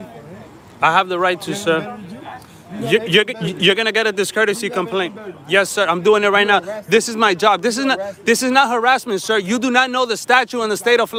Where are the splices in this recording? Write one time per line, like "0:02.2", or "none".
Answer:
none